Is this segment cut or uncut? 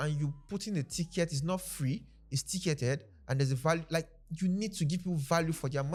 uncut